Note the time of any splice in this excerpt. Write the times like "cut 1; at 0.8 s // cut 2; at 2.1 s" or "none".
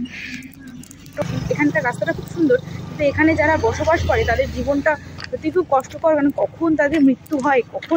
cut 1; at 1.2 s